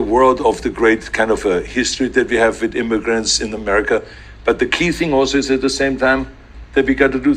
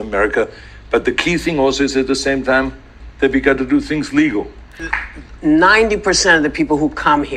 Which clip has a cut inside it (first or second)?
second